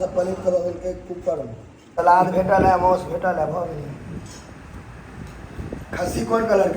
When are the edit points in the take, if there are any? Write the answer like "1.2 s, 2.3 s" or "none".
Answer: 1.9 s